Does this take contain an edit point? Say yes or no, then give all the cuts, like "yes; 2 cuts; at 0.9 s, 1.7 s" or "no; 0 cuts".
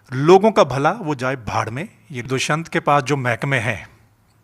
yes; 1 cut; at 2.3 s